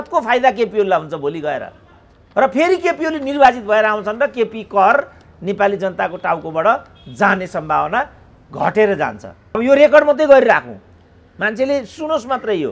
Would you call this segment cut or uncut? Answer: cut